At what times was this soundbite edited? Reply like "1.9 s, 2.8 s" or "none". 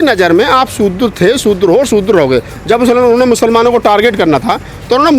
2.5 s